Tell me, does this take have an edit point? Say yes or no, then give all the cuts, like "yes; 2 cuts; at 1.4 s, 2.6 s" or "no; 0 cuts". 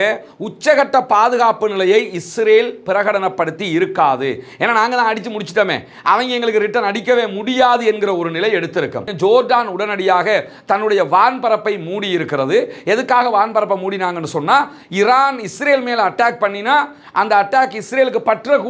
yes; 1 cut; at 9.0 s